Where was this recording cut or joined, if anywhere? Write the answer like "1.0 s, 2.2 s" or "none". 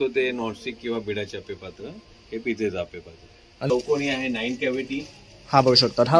3.7 s